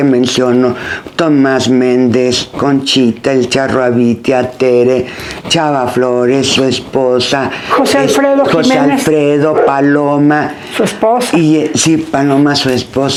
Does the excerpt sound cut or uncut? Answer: uncut